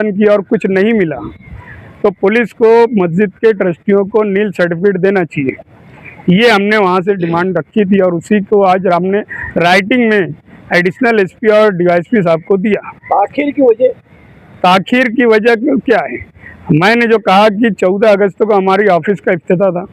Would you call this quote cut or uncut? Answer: uncut